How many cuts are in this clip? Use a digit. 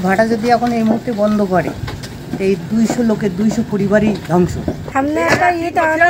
1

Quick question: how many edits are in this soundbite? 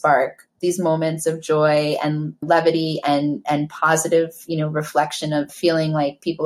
2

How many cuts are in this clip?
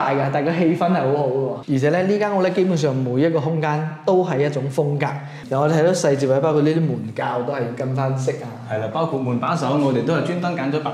2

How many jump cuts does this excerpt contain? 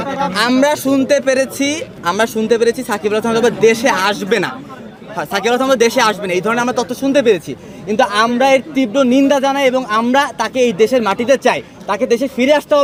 0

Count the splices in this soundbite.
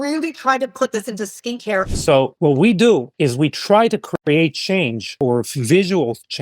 3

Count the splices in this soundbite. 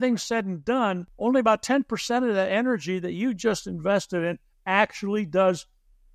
1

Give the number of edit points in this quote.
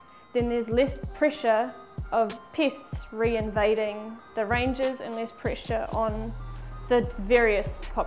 0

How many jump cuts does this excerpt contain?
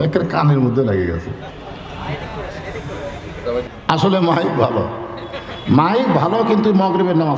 1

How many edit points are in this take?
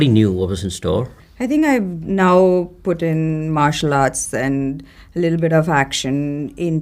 1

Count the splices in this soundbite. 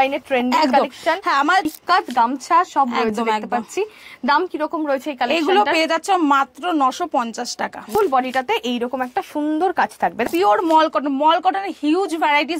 3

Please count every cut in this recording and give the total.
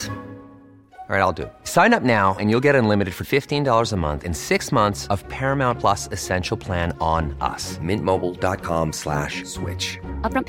0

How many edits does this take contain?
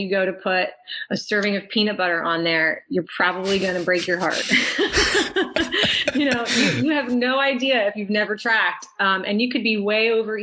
0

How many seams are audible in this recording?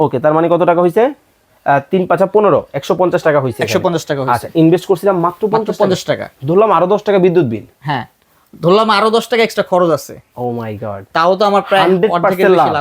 0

